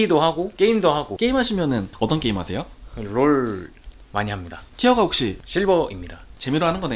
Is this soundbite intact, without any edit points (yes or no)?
no